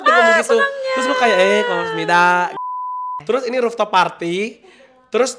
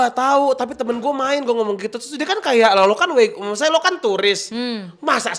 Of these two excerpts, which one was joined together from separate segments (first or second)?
first